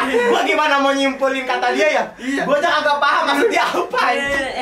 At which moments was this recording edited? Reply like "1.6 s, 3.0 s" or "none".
none